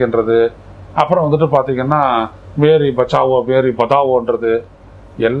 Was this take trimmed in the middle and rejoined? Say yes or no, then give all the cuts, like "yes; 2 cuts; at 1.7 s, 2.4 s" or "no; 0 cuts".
no; 0 cuts